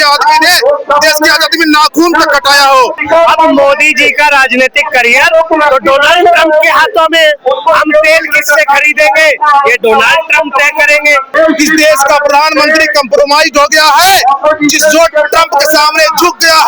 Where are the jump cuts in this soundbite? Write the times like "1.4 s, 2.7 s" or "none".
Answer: 3.0 s, 11.3 s